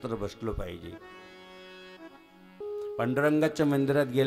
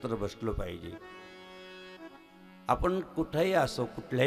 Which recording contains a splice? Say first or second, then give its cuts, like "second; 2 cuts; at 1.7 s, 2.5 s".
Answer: first; 1 cut; at 2.6 s